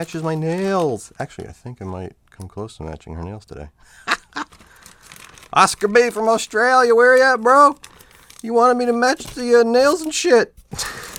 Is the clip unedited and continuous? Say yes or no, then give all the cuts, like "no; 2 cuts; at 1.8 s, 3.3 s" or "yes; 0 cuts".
yes; 0 cuts